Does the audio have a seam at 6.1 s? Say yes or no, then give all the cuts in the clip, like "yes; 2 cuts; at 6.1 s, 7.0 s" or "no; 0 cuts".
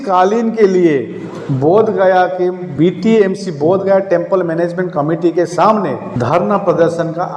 yes; 1 cut; at 6.1 s